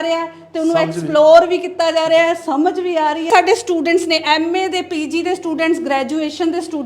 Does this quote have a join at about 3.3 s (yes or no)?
yes